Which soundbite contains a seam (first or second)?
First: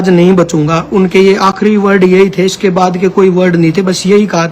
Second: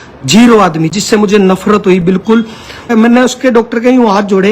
second